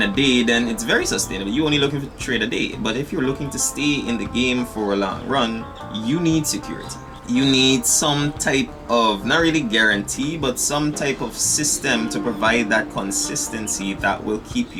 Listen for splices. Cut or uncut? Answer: uncut